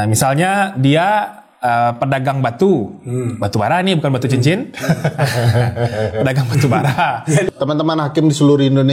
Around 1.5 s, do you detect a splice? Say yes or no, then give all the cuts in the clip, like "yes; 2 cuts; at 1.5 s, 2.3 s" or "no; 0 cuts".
no; 1 cut; at 7.5 s